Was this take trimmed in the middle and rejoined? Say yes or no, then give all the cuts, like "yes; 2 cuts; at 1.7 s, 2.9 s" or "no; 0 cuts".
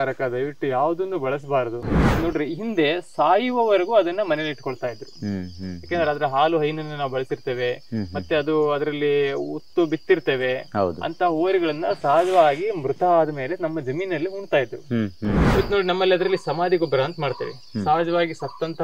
yes; 2 cuts; at 2.0 s, 15.4 s